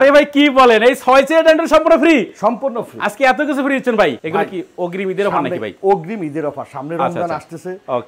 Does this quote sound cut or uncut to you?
uncut